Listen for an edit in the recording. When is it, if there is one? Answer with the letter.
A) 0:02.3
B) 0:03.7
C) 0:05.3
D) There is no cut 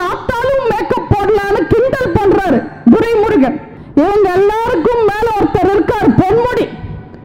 B